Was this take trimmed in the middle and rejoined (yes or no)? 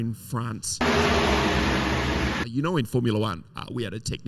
yes